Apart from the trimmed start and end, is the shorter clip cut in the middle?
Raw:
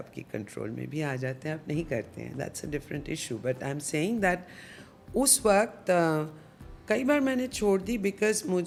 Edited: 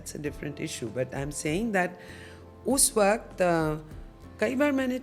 no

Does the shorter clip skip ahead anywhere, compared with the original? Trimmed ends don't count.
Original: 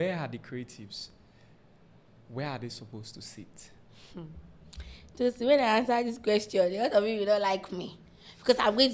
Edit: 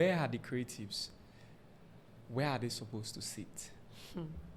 no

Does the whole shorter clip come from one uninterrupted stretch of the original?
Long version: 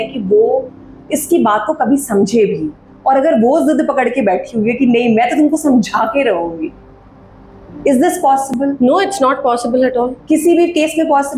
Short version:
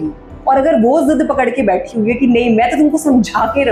yes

